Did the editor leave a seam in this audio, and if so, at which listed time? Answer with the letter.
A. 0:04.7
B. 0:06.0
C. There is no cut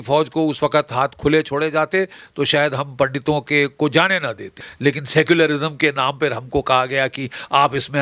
A